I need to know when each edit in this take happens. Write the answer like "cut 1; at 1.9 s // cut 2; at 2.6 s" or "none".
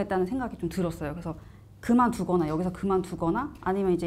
none